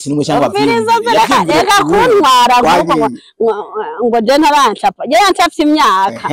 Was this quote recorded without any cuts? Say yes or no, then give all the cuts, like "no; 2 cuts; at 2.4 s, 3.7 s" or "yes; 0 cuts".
yes; 0 cuts